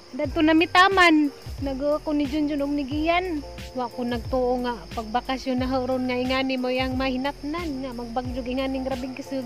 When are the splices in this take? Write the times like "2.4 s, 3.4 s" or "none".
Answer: 1.5 s, 3.7 s